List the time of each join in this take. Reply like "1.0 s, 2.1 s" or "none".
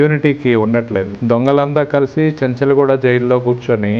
1.1 s